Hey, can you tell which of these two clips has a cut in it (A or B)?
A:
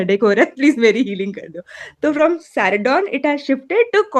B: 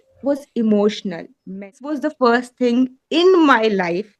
B